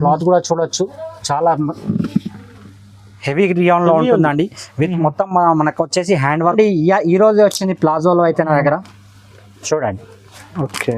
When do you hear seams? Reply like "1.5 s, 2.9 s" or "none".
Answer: 6.5 s